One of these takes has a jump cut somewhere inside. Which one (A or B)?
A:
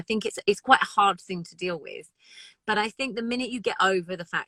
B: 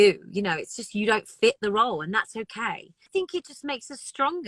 B